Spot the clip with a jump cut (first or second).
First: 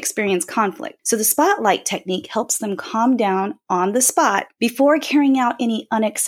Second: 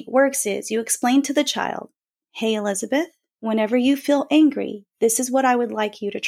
first